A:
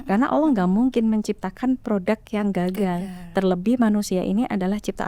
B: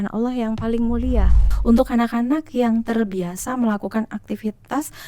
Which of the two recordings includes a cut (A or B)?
B